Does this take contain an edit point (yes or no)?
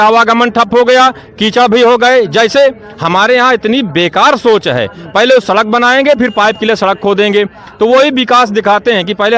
no